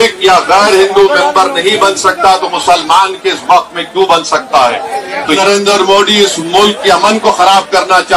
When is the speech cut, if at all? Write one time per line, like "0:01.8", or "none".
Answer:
0:05.4